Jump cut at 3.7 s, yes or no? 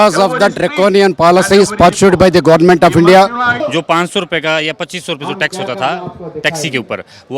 yes